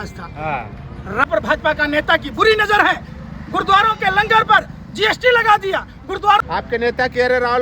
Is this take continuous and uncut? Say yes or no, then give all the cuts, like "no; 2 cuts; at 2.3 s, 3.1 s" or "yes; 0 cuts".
no; 2 cuts; at 1.2 s, 6.4 s